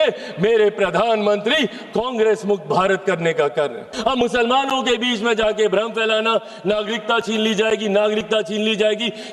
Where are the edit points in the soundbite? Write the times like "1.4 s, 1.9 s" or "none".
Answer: 3.9 s